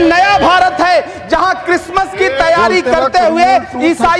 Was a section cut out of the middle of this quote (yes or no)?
no